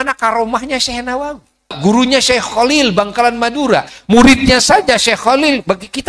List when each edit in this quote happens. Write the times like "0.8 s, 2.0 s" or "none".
1.8 s

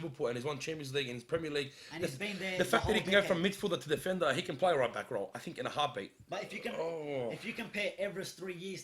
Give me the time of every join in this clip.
6.2 s

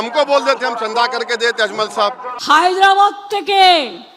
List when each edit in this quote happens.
2.3 s

